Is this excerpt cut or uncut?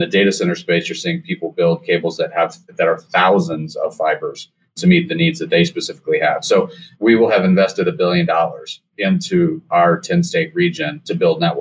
cut